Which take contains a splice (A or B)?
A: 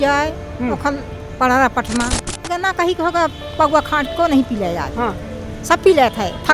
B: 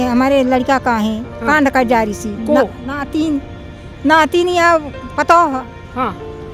A